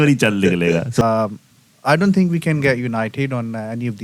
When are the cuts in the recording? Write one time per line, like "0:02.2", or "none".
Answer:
0:01.0